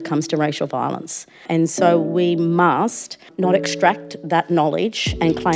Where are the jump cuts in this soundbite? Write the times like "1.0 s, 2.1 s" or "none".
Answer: 1.5 s, 3.3 s